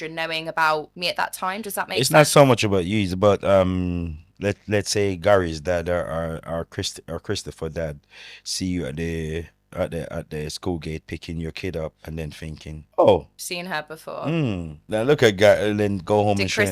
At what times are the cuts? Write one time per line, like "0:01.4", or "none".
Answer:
0:00.9
0:12.8
0:13.4
0:14.7